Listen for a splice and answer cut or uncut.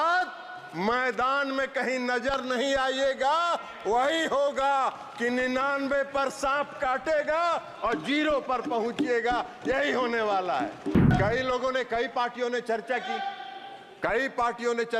cut